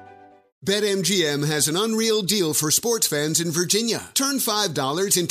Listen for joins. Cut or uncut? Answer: uncut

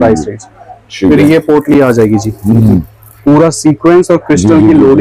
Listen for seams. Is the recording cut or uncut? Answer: uncut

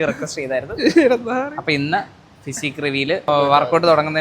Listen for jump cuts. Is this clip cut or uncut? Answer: cut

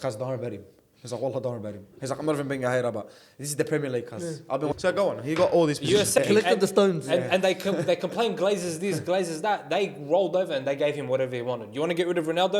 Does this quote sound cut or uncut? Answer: cut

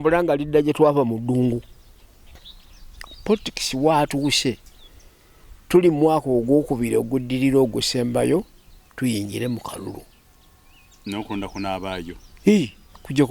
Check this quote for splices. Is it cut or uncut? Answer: cut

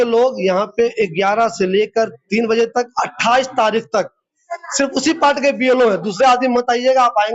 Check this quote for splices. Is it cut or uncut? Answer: uncut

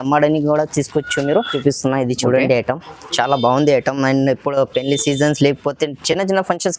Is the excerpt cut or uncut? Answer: cut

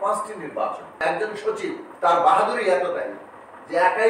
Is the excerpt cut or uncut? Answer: cut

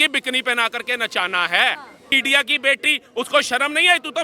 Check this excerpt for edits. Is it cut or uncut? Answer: cut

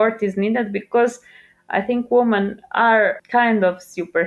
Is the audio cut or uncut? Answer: cut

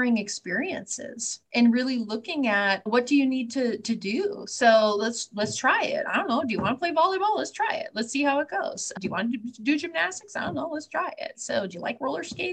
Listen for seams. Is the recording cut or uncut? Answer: uncut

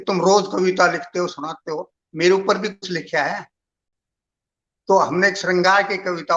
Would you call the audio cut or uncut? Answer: uncut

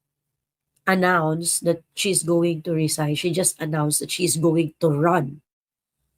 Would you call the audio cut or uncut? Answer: uncut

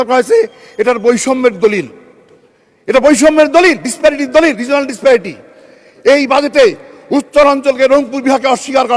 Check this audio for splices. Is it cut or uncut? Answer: uncut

